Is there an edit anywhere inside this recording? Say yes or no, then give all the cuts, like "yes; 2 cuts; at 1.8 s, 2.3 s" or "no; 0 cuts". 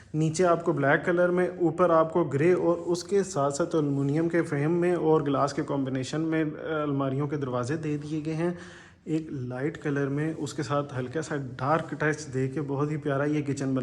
no; 0 cuts